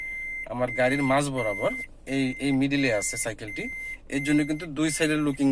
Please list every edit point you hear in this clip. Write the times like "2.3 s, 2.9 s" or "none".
none